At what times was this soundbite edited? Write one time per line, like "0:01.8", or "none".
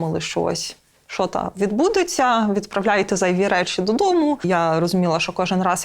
0:04.4